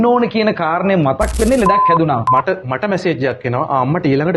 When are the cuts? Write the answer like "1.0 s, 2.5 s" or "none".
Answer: 2.3 s